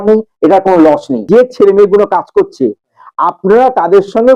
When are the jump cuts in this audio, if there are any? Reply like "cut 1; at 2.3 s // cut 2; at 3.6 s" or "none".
cut 1; at 1.2 s